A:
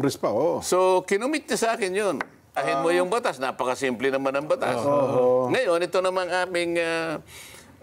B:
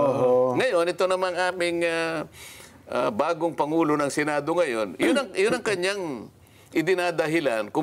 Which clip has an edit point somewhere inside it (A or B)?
A